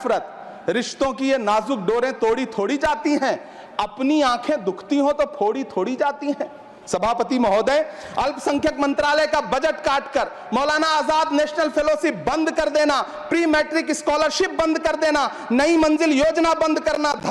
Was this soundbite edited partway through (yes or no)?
no